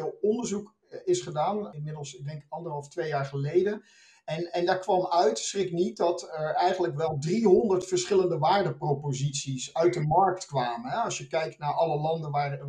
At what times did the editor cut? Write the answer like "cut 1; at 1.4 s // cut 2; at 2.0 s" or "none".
cut 1; at 1.8 s